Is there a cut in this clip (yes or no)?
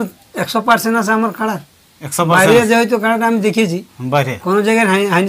no